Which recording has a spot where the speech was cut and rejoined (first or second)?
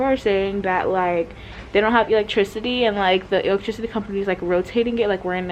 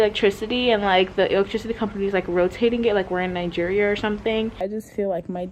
second